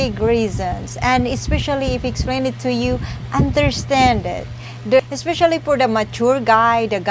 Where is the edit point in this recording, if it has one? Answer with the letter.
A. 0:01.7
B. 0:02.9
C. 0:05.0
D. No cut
C